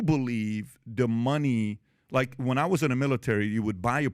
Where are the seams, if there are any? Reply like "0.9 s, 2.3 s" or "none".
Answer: 1.9 s